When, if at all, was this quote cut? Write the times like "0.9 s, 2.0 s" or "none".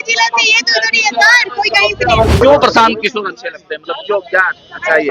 2.4 s